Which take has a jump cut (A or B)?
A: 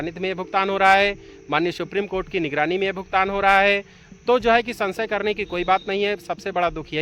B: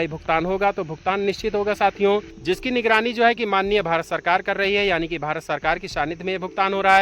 B